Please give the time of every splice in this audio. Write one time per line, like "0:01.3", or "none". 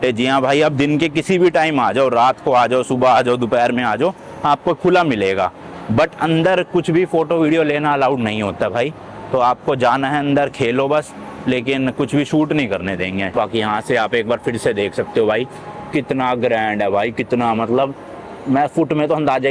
none